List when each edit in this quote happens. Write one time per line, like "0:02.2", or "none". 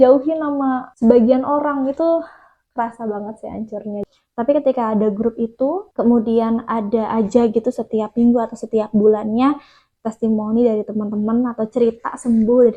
0:04.0